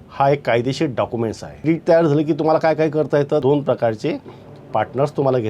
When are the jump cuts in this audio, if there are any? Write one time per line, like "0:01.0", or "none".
0:01.6
0:03.4